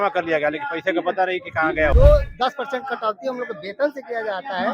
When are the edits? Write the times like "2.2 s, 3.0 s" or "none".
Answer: 1.9 s